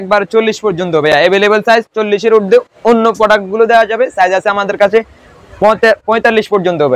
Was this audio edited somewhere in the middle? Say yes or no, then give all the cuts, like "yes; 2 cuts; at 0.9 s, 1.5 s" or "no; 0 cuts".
no; 0 cuts